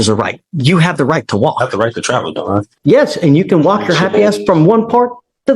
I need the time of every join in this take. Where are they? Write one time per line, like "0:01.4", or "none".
0:02.7